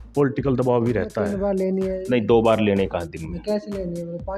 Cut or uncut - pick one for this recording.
cut